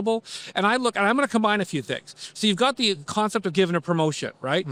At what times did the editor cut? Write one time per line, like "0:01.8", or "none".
none